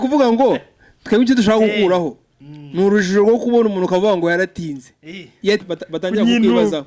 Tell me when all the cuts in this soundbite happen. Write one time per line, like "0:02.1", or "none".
0:05.6